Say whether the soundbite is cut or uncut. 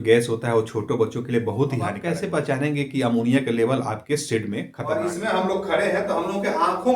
cut